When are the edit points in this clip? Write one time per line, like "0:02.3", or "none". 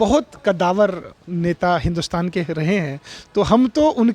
none